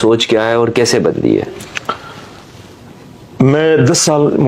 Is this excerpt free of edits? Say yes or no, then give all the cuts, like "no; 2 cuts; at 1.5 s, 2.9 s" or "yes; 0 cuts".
yes; 0 cuts